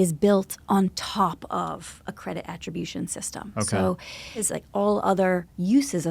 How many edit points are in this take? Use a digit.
1